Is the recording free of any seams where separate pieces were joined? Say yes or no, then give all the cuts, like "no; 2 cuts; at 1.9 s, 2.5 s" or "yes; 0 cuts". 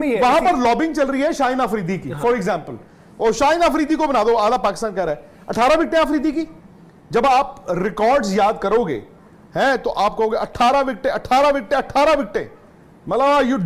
yes; 0 cuts